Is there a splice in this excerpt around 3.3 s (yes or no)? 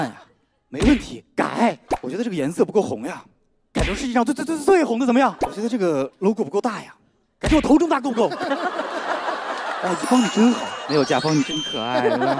no